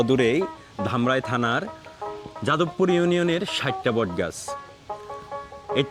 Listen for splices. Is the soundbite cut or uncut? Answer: uncut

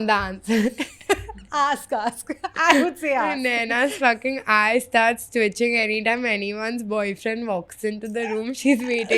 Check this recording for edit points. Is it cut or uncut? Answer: uncut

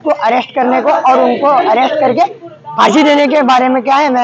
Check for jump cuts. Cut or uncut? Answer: uncut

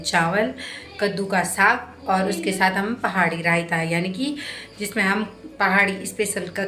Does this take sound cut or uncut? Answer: uncut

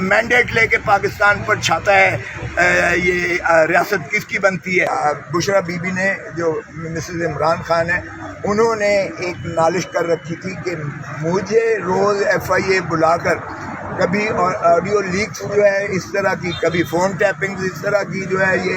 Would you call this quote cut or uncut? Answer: cut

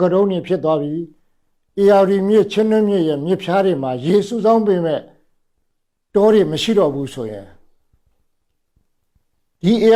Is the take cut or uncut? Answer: uncut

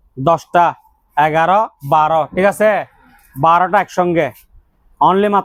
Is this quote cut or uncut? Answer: uncut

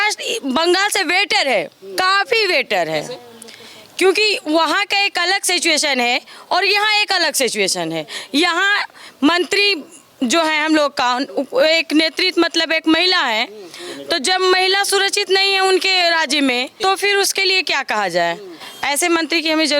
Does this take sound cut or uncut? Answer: uncut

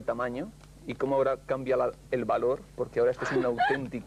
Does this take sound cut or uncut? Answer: cut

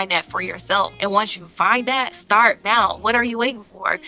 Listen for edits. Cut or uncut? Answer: cut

